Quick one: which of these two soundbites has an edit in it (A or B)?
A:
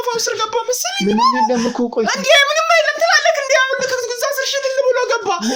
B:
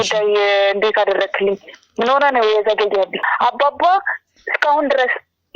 B